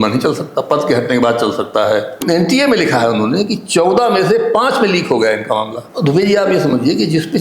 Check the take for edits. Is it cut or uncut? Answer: cut